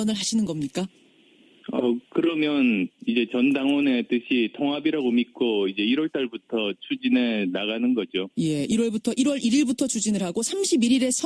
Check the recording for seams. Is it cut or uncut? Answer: uncut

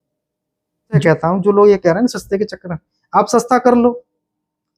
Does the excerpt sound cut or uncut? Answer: cut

